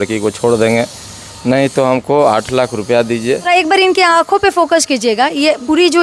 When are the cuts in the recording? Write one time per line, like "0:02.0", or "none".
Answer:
0:03.4

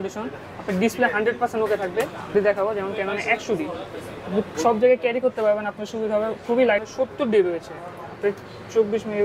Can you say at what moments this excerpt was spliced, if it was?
0:02.3
0:06.8

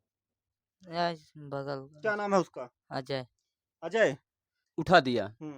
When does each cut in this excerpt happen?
0:04.7

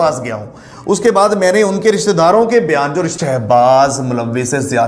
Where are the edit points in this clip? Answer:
0:03.1

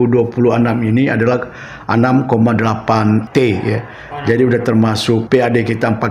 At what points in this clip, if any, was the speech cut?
0:03.3
0:05.2

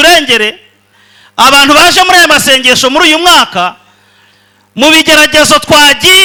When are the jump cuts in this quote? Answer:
none

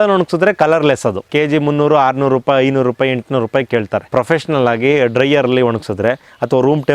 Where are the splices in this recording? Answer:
0:01.3
0:04.1

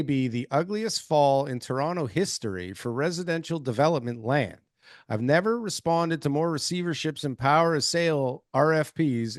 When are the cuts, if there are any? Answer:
none

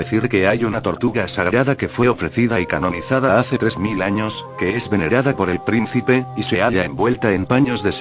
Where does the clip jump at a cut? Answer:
none

